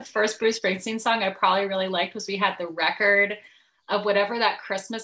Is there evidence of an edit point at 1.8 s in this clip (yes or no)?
no